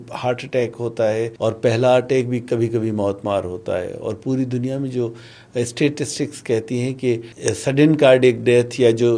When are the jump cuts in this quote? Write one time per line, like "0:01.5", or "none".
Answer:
0:01.3
0:07.3